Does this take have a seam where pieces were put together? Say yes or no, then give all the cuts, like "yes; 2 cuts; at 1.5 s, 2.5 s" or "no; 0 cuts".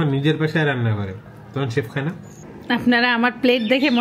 yes; 1 cut; at 2.4 s